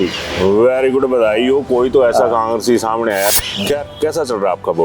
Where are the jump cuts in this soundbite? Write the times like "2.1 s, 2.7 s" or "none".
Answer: 3.4 s